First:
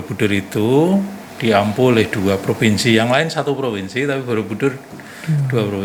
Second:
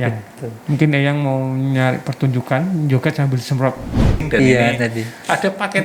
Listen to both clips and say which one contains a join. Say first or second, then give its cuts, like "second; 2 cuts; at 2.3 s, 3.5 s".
second; 1 cut; at 4.2 s